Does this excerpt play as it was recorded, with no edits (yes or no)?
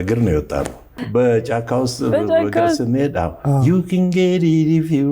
no